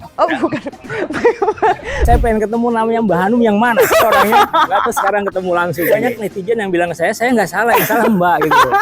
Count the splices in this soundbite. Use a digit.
2